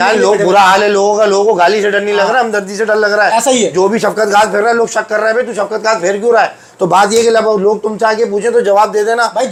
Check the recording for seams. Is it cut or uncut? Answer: uncut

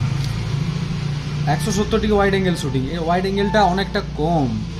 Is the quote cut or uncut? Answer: uncut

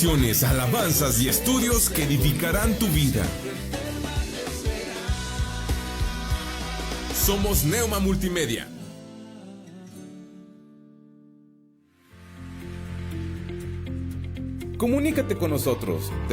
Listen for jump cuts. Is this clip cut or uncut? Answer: cut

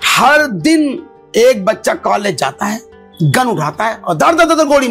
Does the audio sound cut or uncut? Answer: uncut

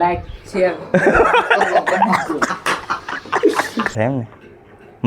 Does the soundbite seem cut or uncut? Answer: cut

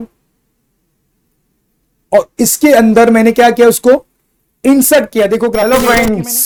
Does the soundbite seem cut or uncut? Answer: uncut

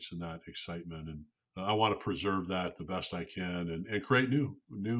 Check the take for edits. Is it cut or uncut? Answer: cut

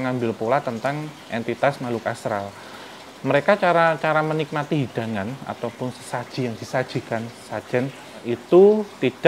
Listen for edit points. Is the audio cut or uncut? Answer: cut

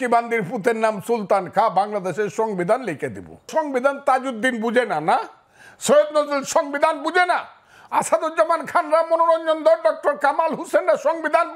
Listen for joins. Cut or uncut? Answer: cut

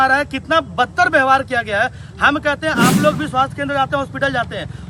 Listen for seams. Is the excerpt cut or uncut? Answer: uncut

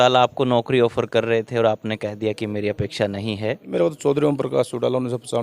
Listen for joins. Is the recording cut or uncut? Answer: cut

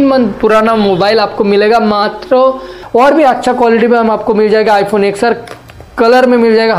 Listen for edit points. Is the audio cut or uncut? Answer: cut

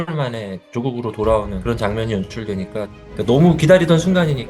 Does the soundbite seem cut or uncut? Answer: cut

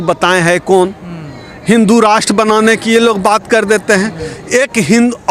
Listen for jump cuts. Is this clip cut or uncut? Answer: uncut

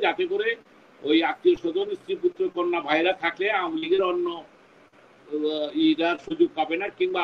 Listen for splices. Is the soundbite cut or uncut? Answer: uncut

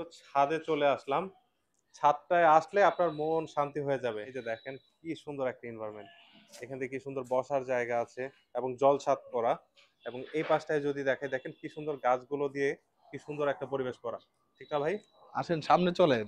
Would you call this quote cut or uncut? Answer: uncut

